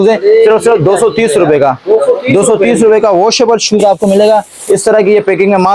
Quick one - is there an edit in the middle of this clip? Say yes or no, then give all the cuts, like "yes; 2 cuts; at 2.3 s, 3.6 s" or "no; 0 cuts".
no; 0 cuts